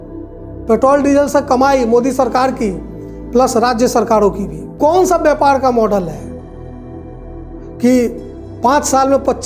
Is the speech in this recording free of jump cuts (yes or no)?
no